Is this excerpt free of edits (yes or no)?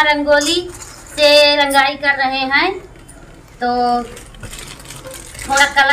yes